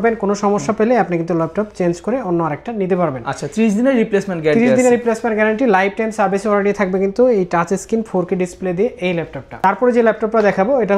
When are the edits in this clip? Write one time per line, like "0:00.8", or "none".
none